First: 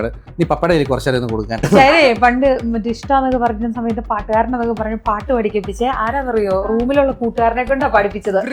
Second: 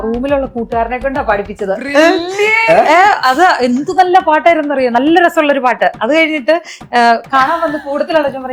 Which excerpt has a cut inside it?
first; 1 cut; at 1.6 s

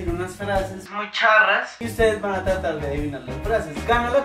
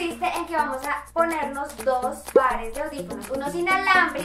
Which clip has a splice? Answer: first; 1 cut; at 1.8 s

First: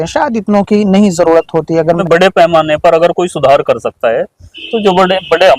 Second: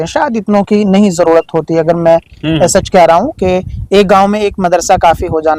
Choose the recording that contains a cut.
first; 1 cut; at 2.0 s

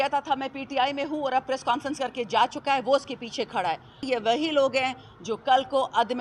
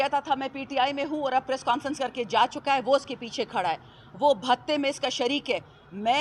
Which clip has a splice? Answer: first; 1 cut; at 4.0 s

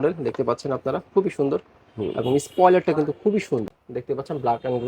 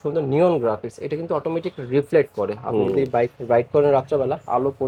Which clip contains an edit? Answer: first; 1 cut; at 3.7 s

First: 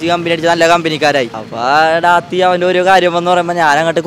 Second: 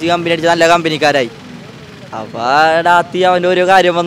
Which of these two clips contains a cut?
first; 1 cut; at 1.4 s

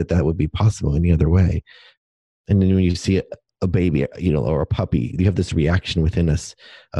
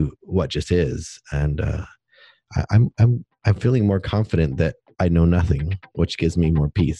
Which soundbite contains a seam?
first; 2 cuts; at 1.9 s, 3.4 s

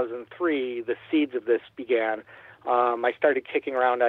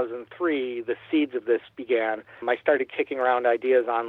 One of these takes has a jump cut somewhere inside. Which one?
second; 1 cut; at 2.4 s

